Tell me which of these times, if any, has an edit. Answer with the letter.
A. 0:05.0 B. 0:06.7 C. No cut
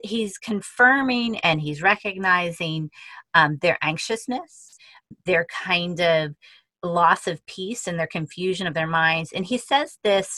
A